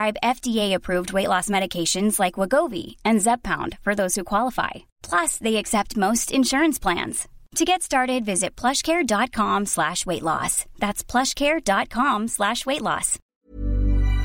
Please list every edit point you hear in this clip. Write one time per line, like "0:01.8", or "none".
0:13.2